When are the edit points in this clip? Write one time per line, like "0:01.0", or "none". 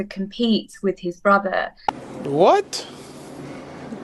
0:01.7